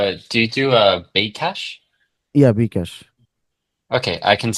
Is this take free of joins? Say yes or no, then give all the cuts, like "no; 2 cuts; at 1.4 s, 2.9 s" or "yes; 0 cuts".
yes; 0 cuts